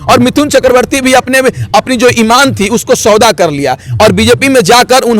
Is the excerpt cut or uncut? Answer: uncut